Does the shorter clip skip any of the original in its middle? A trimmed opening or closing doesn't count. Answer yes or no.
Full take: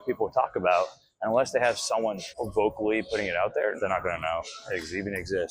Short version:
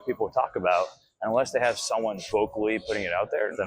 yes